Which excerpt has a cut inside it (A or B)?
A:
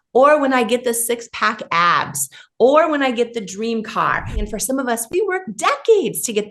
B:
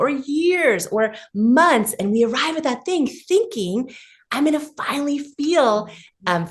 A